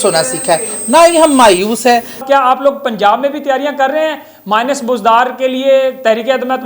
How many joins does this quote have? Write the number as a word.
one